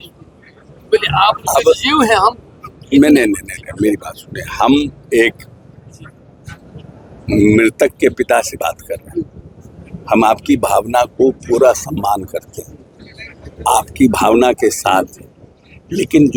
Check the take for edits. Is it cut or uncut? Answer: uncut